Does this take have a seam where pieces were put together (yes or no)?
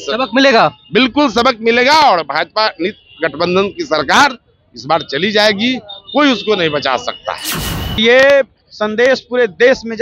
yes